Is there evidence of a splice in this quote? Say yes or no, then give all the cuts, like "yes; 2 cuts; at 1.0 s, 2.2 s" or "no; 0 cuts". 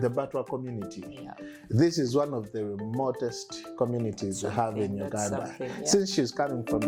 no; 0 cuts